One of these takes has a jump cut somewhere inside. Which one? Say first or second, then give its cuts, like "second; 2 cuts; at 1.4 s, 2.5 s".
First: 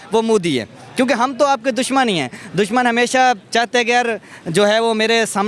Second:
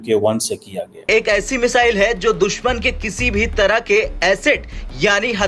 second; 1 cut; at 1.1 s